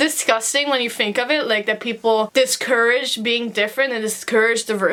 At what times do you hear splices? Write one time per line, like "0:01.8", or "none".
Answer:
none